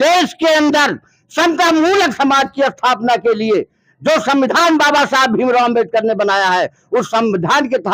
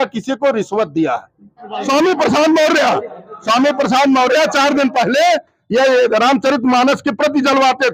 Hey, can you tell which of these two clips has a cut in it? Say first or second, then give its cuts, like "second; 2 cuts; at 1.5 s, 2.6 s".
second; 1 cut; at 1.8 s